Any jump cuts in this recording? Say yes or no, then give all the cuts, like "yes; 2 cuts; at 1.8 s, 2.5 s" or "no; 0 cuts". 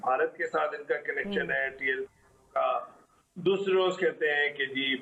no; 0 cuts